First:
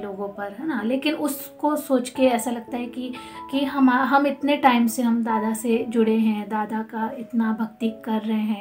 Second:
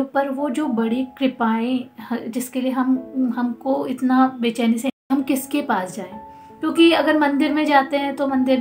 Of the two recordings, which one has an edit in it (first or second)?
second